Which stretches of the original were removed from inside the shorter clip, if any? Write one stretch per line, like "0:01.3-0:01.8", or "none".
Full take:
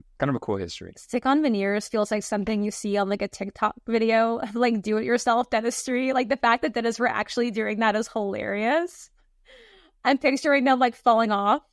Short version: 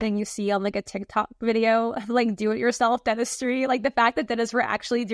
none